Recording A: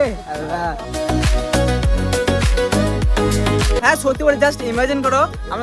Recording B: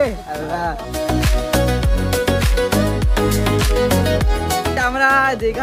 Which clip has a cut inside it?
A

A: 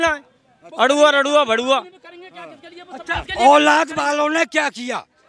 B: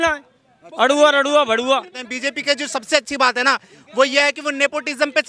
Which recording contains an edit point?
B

